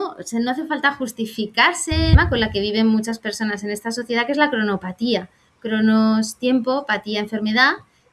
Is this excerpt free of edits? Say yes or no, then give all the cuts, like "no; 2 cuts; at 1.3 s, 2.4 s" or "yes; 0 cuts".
no; 1 cut; at 2.2 s